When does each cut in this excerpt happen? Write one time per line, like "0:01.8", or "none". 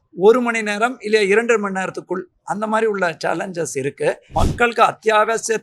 0:04.3